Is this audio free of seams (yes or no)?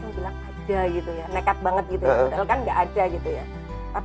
yes